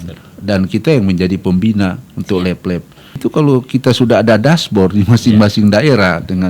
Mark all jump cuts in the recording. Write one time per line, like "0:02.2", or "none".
0:03.2